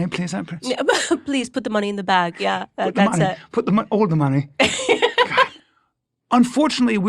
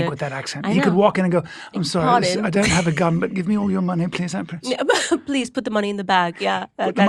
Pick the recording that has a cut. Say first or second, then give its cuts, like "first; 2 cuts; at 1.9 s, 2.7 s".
first; 1 cut; at 5.5 s